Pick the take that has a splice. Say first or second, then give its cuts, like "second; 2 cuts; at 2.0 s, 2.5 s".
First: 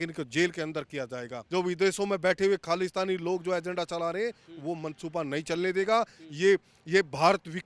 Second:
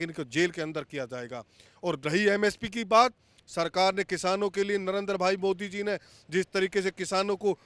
first; 1 cut; at 1.3 s